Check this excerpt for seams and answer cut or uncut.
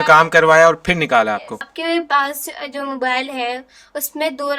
cut